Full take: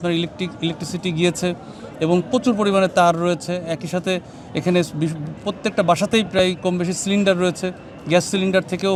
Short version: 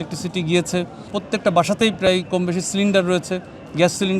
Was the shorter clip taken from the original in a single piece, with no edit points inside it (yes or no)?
no